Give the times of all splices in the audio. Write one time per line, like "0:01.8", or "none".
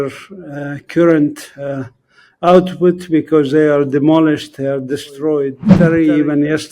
0:05.7